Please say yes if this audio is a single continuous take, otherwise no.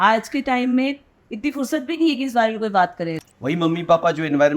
no